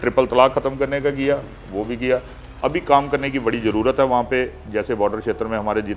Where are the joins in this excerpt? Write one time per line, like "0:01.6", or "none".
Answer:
0:02.5